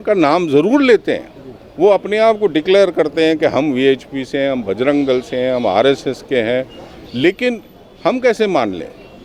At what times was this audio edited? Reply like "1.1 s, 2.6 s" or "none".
none